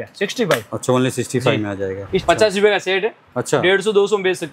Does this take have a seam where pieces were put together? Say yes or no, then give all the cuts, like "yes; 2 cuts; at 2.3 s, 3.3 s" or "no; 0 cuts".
yes; 1 cut; at 2.2 s